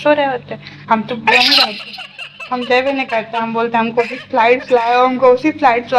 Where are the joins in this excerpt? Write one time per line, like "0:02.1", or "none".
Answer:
none